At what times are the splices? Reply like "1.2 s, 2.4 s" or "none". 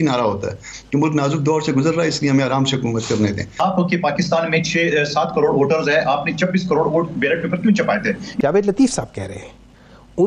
3.6 s, 8.3 s